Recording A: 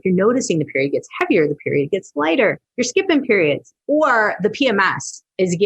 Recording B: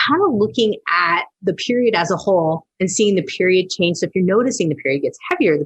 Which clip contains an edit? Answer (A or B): A